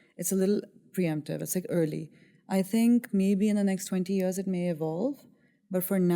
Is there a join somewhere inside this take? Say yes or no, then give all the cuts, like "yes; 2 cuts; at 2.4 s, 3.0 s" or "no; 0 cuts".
no; 0 cuts